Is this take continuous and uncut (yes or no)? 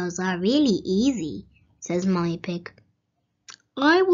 no